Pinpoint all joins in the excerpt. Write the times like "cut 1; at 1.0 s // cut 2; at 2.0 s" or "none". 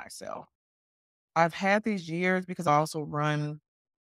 cut 1; at 2.7 s